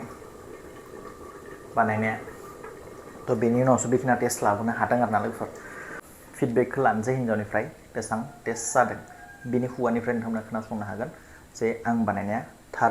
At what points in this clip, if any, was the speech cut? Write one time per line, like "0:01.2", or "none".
0:06.0

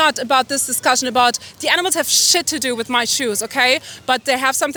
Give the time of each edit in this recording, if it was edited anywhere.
none

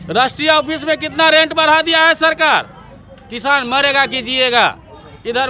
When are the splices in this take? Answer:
none

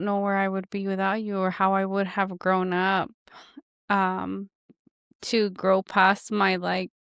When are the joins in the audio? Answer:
none

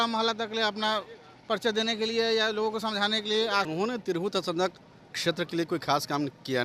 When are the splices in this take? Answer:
0:03.7

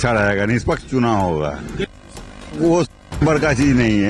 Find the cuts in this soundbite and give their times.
0:02.5

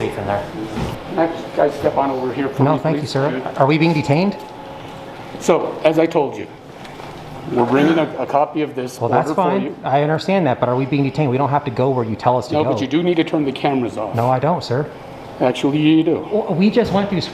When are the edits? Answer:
0:01.0

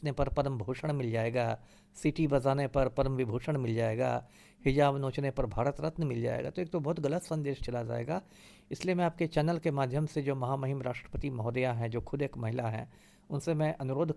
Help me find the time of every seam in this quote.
none

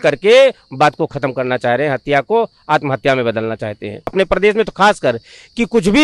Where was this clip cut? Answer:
0:04.1

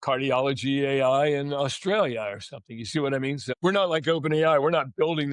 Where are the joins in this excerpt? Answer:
0:03.5

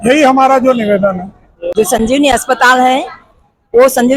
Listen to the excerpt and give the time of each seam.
0:01.6

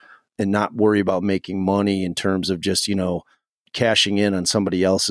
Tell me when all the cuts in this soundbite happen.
0:03.6

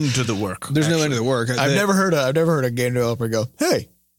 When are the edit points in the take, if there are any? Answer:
none

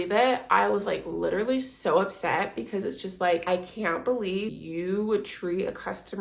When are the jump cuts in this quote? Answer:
0:03.4
0:04.5

